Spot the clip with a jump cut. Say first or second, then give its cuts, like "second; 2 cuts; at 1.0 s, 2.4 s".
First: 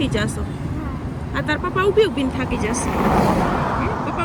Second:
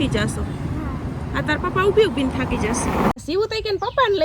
second; 1 cut; at 3.1 s